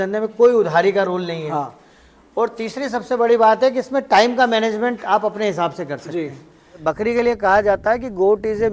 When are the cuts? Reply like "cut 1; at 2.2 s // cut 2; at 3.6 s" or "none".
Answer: cut 1; at 6.8 s